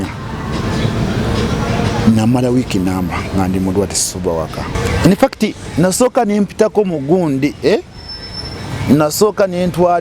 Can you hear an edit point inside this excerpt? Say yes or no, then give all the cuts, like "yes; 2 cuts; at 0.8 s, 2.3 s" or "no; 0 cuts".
yes; 1 cut; at 4.8 s